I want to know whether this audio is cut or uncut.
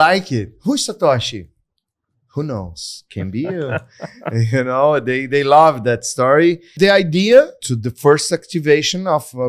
cut